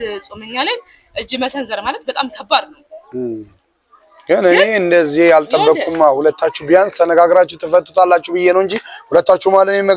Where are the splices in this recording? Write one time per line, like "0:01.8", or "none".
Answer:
none